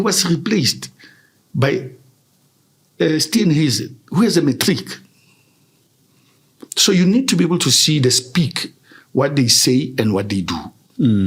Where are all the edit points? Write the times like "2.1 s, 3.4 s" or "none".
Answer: none